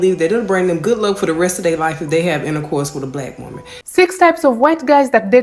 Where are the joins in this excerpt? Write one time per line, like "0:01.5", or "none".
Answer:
0:03.8